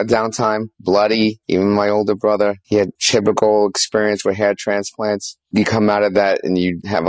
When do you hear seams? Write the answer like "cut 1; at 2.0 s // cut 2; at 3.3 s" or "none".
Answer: none